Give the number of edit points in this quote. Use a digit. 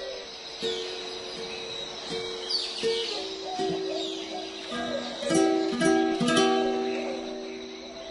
1